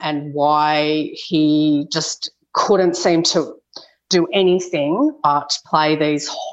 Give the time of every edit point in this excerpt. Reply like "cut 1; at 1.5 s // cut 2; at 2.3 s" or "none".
none